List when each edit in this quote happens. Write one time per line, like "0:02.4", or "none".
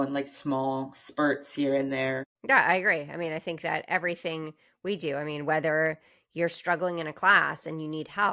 0:02.3